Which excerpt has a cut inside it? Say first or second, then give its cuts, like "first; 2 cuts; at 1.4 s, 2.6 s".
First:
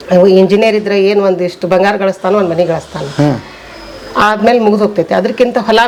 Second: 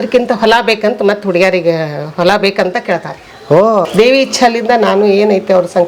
second; 1 cut; at 3.9 s